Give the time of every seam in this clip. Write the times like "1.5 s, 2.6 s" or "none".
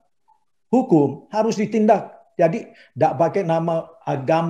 none